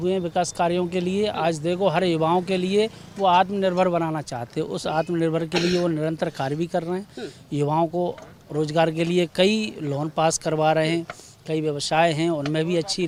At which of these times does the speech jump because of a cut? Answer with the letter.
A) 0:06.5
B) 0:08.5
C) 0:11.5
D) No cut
D